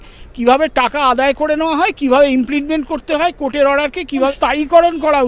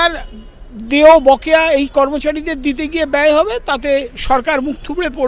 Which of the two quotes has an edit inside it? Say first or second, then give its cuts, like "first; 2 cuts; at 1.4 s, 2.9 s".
first; 1 cut; at 4.3 s